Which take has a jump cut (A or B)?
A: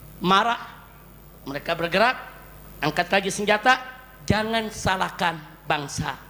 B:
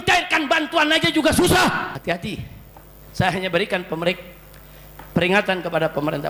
B